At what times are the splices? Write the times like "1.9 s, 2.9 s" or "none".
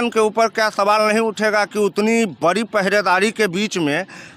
none